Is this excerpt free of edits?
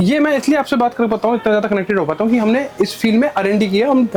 yes; 0 cuts

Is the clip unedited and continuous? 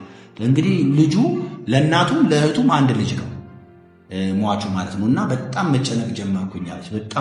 yes; 0 cuts

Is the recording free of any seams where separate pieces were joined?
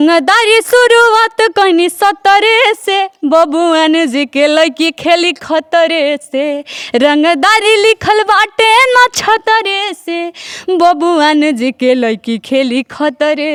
yes; 0 cuts

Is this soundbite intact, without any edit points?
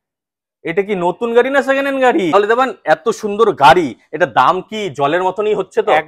no; 1 cut; at 2.3 s

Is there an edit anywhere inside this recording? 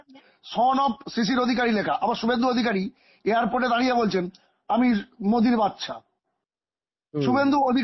no; 0 cuts

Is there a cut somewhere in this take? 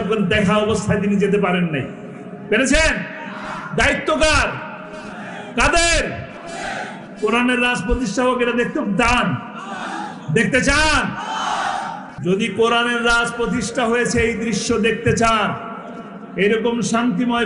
yes; 1 cut; at 12.0 s

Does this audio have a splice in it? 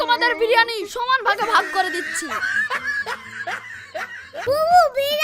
yes; 1 cut; at 4.3 s

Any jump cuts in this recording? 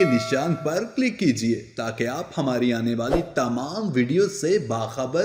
no; 0 cuts

